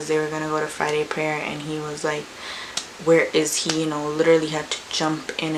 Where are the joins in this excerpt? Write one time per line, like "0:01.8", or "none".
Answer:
none